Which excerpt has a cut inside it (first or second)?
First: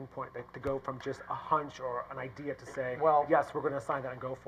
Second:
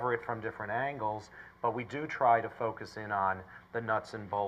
second